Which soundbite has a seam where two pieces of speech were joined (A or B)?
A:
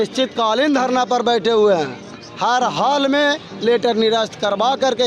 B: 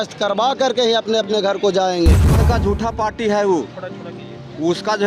B